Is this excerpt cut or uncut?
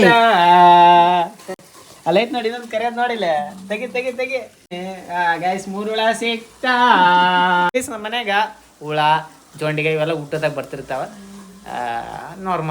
cut